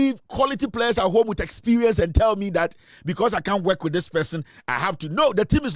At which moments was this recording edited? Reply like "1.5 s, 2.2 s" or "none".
none